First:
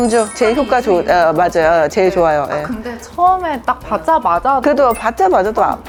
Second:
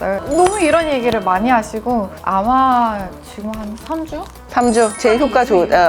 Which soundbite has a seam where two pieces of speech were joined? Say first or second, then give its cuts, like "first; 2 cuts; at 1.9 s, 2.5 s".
second; 1 cut; at 2.1 s